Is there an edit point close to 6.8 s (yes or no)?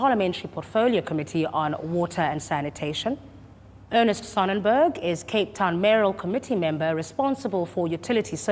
yes